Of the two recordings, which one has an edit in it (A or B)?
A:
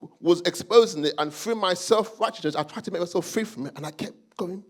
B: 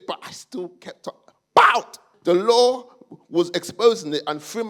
B